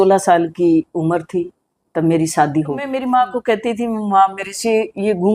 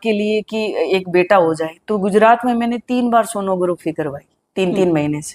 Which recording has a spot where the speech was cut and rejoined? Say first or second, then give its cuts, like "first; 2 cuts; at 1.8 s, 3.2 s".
first; 1 cut; at 2.9 s